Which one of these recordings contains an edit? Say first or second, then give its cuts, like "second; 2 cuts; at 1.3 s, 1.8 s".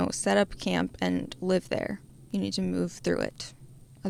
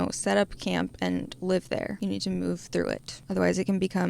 second; 2 cuts; at 1.9 s, 3.1 s